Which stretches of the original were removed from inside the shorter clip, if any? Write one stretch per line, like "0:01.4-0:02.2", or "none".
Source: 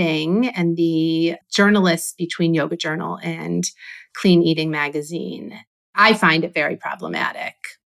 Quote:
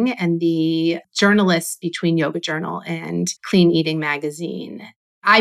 0:03.7-0:04.1